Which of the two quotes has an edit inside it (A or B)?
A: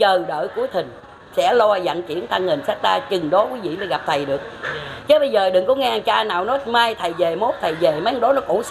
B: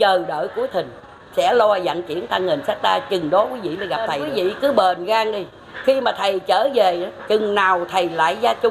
B